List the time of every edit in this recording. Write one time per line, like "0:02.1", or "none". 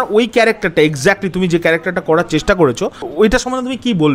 0:03.0